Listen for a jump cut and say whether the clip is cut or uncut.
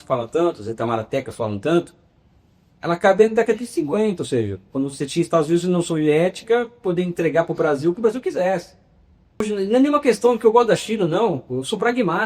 cut